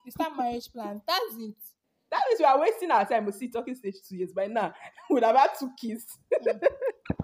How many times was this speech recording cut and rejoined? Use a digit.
0